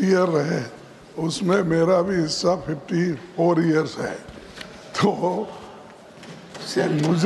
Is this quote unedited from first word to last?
yes; 0 cuts

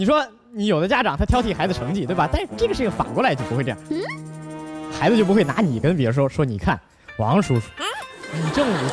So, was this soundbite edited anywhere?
no; 0 cuts

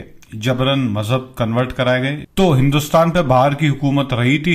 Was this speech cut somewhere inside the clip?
yes; 1 cut; at 2.2 s

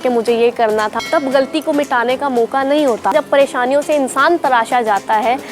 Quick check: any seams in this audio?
yes; 2 cuts; at 0.9 s, 3.1 s

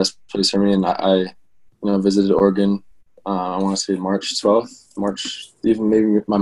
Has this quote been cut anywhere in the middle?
no; 0 cuts

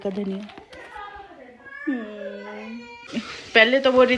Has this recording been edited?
yes; 1 cut; at 3.0 s

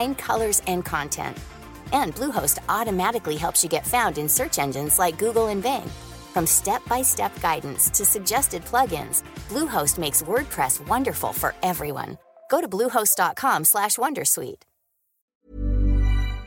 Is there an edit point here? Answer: yes; 1 cut; at 15.5 s

